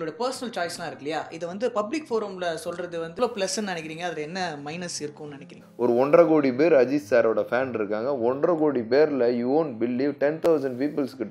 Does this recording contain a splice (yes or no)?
yes